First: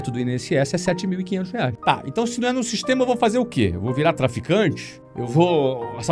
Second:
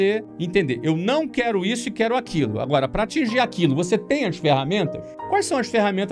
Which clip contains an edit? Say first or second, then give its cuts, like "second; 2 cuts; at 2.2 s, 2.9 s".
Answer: first; 1 cut; at 1.7 s